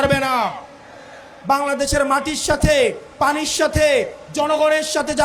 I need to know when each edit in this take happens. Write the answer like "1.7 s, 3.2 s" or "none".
1.3 s